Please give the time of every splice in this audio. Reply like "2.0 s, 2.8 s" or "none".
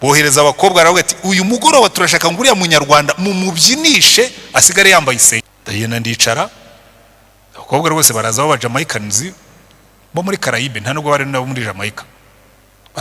5.5 s

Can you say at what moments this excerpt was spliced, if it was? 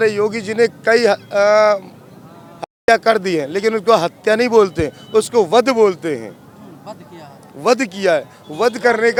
none

